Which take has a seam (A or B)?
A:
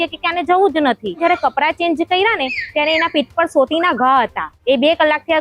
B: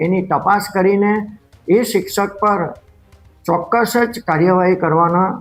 A